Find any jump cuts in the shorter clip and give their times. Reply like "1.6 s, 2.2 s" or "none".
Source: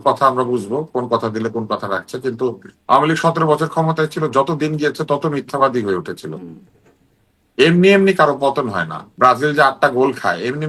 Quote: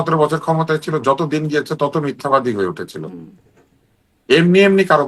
none